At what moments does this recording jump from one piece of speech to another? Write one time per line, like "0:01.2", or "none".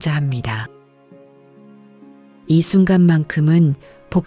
none

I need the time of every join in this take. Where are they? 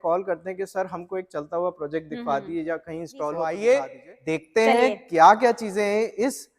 0:03.3

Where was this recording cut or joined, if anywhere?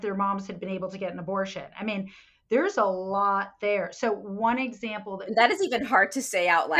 none

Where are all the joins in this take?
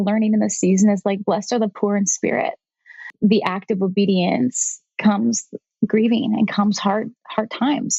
0:03.0

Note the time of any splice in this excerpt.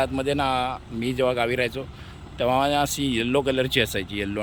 none

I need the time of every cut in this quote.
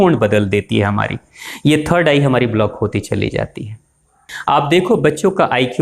0:04.3

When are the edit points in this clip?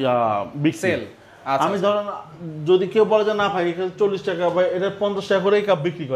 none

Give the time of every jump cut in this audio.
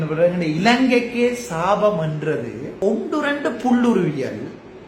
0:02.7

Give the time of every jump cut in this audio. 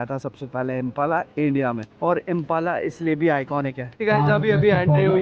0:01.9
0:04.0

